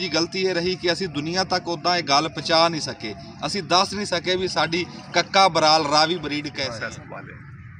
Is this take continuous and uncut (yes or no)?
no